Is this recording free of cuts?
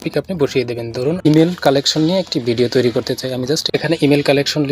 no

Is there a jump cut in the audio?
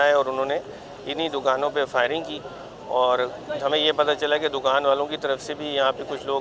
no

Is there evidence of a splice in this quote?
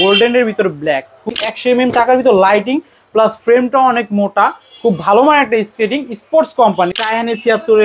yes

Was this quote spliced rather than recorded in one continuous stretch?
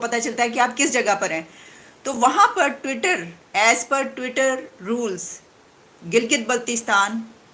no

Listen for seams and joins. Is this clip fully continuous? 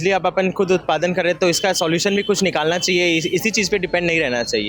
yes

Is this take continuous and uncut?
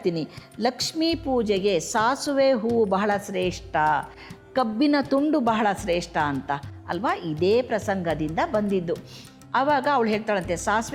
yes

